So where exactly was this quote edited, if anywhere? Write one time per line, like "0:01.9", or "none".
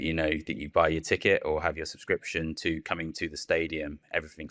none